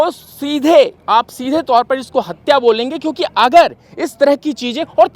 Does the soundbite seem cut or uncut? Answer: uncut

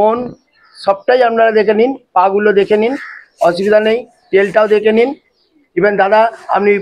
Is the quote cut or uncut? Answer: uncut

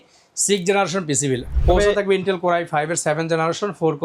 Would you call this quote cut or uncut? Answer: cut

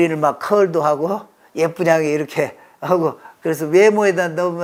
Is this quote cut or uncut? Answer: uncut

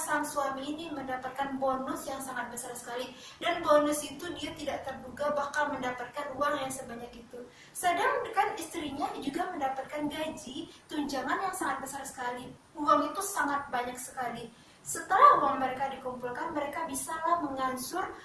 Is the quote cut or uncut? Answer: uncut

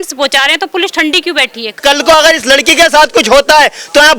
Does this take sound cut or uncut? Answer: cut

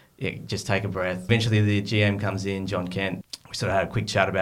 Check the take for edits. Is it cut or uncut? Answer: cut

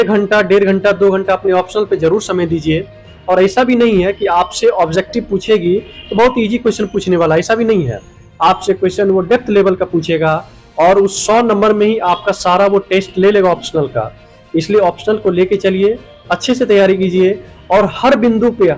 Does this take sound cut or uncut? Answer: uncut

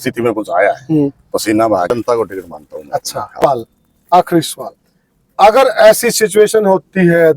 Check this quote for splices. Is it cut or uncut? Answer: cut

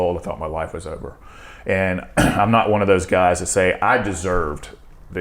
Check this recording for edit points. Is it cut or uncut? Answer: uncut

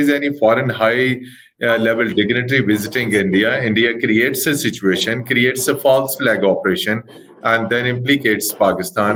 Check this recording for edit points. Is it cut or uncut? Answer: uncut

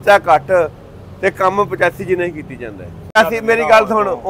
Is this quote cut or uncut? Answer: cut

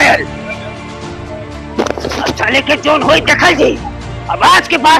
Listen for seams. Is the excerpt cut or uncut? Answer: uncut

